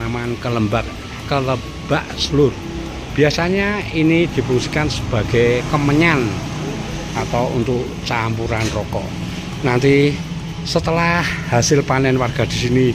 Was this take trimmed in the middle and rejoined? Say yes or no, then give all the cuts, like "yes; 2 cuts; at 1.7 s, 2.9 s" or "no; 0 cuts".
no; 0 cuts